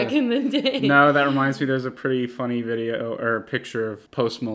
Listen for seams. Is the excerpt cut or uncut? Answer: uncut